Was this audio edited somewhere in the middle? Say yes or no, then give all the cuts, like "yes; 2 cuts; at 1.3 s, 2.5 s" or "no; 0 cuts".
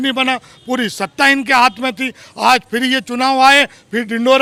no; 0 cuts